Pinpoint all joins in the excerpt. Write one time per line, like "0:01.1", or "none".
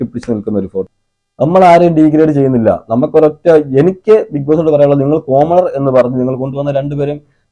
0:01.0